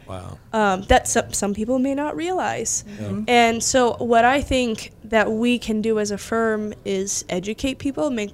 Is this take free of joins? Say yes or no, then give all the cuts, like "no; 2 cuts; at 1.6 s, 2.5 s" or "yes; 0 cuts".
yes; 0 cuts